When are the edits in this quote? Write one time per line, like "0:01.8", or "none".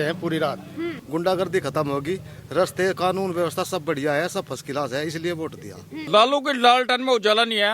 0:01.0
0:06.1